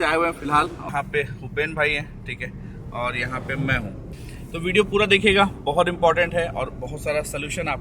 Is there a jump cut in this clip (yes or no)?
yes